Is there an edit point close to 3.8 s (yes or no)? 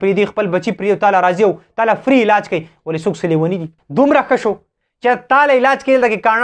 yes